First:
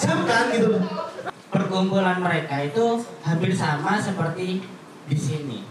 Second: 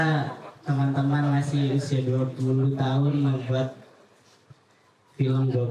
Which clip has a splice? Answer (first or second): first